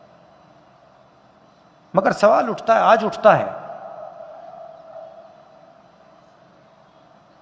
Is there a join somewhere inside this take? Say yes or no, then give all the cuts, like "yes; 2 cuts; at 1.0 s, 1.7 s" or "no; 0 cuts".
no; 0 cuts